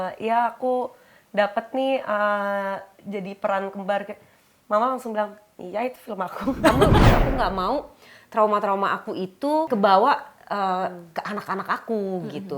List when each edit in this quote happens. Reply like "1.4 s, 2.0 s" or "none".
6.9 s, 9.7 s